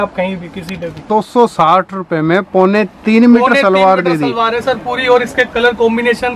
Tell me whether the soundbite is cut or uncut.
cut